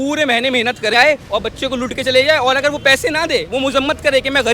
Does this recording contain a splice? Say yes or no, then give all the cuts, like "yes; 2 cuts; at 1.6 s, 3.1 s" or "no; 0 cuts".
yes; 1 cut; at 0.9 s